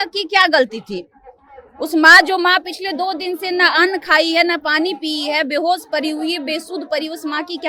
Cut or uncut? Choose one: uncut